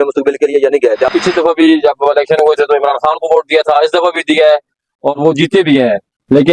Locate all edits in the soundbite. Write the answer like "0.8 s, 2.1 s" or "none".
1.1 s